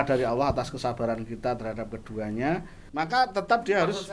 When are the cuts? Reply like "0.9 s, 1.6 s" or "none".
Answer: 2.8 s